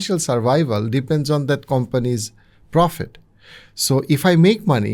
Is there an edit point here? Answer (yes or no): no